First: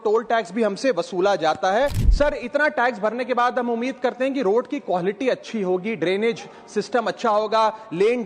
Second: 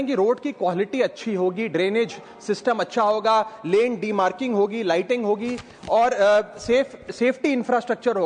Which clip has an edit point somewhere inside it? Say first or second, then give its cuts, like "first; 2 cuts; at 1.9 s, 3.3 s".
first; 1 cut; at 2.0 s